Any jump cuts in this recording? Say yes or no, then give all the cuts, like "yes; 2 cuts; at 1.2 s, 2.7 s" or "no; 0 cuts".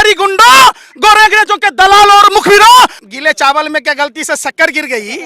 yes; 1 cut; at 3.0 s